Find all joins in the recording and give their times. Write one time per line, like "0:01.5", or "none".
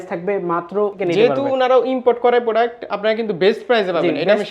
0:00.9